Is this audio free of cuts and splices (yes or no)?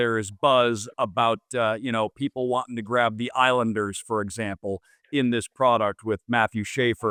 yes